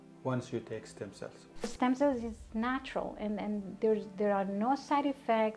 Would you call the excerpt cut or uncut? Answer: cut